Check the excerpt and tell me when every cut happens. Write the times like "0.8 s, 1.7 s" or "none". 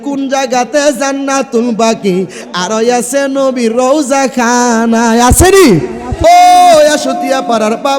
6.2 s